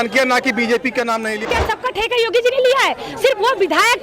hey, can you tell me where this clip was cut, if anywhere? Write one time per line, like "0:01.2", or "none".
0:01.5

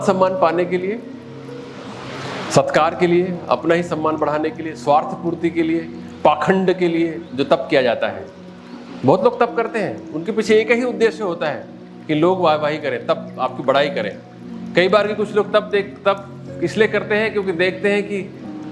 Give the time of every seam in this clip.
none

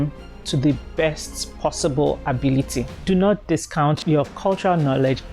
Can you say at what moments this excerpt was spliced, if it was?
0:02.9
0:04.0

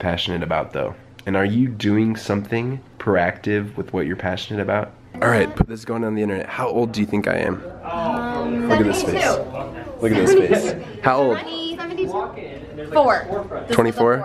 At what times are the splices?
0:02.8
0:05.1

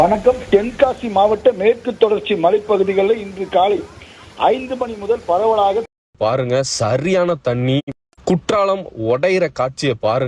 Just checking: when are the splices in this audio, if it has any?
0:06.0

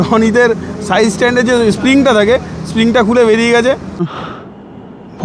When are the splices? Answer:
0:04.0

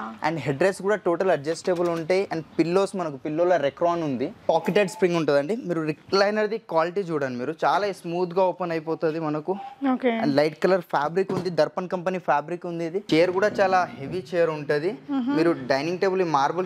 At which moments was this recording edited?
0:04.5
0:13.1

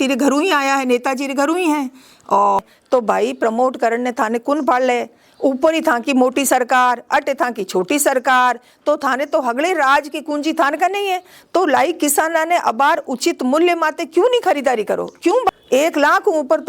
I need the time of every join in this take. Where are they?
0:02.6
0:15.5

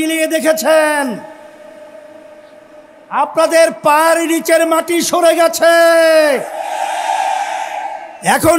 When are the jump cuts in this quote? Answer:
none

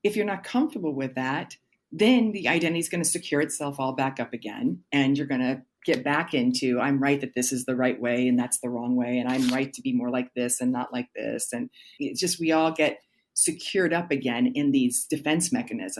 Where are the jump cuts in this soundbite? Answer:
0:05.8
0:11.9

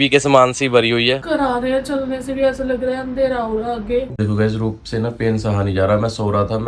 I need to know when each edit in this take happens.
0:01.2
0:04.1

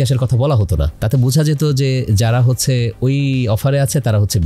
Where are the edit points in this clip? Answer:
0:00.9

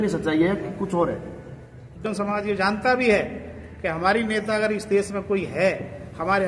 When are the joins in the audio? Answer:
0:02.0

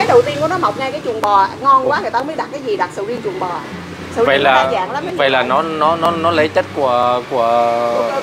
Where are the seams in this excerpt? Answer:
none

